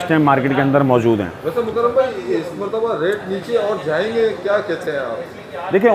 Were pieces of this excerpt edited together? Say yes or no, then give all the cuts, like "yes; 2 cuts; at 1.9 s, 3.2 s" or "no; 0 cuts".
no; 0 cuts